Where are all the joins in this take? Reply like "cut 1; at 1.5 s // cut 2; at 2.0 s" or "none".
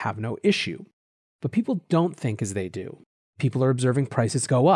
none